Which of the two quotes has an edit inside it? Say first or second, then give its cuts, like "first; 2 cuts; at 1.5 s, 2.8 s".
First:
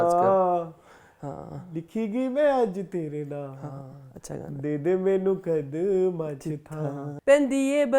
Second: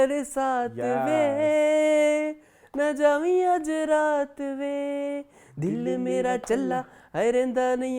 first; 2 cuts; at 4.5 s, 7.1 s